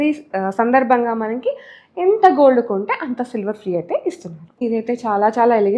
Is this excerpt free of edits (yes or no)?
no